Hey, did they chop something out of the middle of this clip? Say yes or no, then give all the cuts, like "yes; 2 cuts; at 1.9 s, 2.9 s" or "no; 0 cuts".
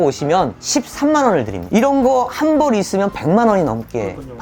yes; 1 cut; at 1.7 s